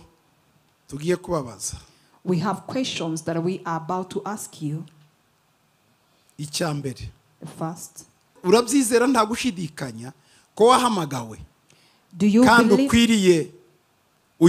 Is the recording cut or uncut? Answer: cut